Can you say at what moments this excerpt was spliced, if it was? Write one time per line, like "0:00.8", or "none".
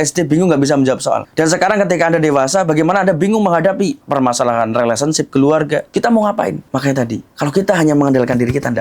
0:04.0
0:05.9